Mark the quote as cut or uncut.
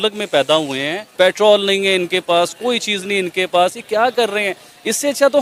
cut